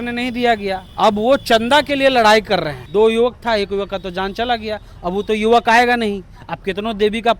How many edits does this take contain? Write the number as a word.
two